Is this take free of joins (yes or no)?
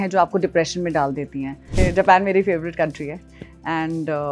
no